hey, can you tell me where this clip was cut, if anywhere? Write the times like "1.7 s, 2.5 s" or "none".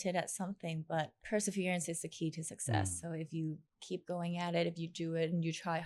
1.2 s